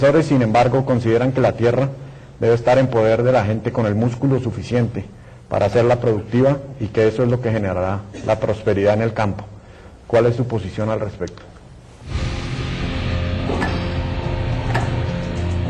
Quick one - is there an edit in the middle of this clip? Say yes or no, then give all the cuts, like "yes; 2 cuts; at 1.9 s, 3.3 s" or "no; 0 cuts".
yes; 1 cut; at 9.4 s